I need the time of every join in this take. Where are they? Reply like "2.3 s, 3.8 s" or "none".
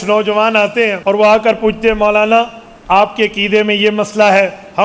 1.0 s